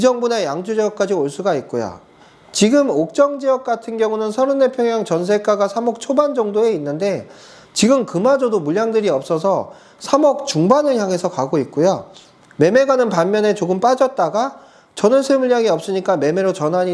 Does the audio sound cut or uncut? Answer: uncut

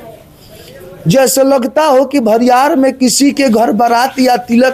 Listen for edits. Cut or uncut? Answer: uncut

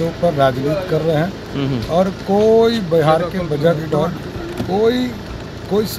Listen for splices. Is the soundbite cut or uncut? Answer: uncut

